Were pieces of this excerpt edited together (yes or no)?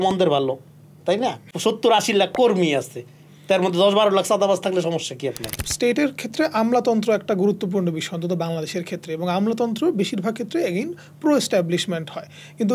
yes